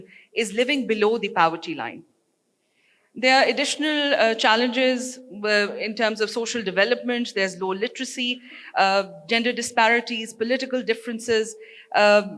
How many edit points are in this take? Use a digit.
0